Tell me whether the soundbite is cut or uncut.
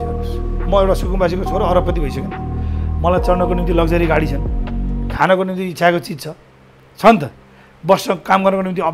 uncut